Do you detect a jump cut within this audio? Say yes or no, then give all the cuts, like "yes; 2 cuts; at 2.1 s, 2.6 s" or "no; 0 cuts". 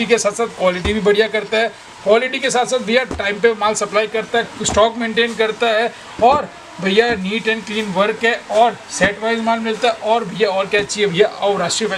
no; 0 cuts